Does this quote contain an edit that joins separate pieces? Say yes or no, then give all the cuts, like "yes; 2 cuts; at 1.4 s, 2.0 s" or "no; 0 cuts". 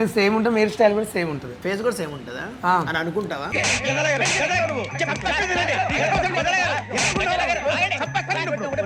no; 0 cuts